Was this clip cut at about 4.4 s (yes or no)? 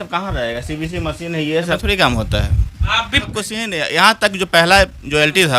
no